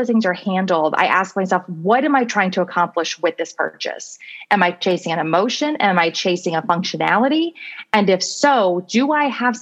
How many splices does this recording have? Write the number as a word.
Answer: zero